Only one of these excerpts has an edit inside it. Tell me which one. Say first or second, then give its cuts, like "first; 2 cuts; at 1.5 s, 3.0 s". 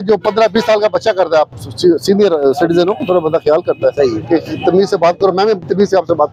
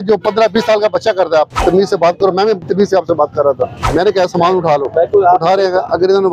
second; 2 cuts; at 1.5 s, 3.8 s